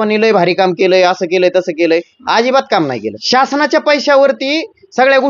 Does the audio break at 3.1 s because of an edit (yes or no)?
yes